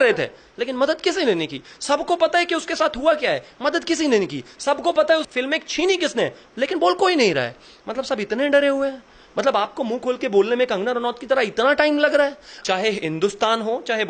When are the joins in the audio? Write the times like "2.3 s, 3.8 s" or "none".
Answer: 12.5 s